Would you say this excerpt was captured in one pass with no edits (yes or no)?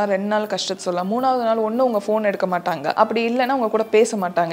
no